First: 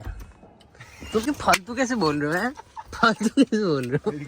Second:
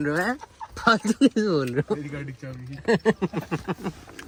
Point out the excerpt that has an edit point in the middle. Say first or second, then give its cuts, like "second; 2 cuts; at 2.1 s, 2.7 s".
first; 1 cut; at 1.2 s